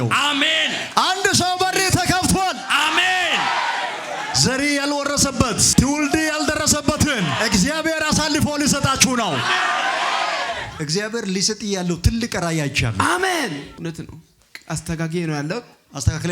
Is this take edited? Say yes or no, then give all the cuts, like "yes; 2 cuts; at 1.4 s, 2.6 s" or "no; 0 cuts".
yes; 2 cuts; at 10.7 s, 13.7 s